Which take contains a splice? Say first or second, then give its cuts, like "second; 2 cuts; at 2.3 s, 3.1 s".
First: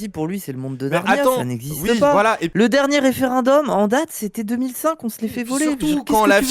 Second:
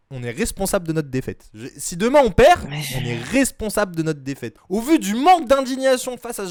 first; 1 cut; at 2.4 s